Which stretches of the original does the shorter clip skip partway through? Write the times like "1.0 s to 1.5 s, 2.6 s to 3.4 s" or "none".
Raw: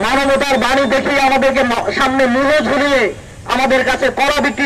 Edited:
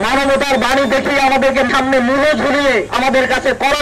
1.7 s to 2.0 s, 3.2 s to 3.5 s